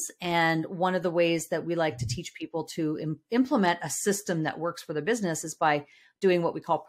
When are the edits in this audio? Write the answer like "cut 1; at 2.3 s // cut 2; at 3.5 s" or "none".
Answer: none